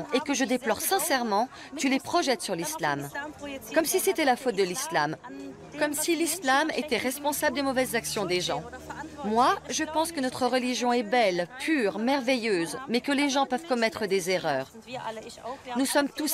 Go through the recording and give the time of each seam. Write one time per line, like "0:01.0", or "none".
none